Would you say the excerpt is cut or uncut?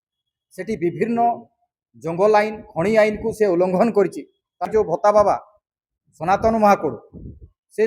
cut